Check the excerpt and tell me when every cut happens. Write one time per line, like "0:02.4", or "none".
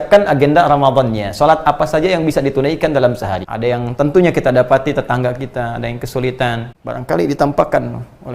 0:03.4
0:06.7